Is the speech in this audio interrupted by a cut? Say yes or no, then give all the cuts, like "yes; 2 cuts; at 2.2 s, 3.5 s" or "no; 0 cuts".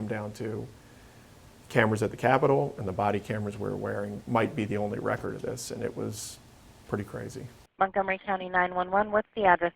yes; 1 cut; at 7.6 s